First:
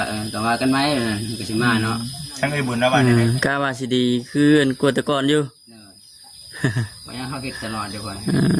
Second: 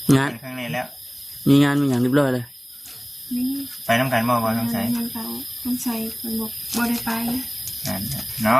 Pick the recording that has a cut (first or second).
first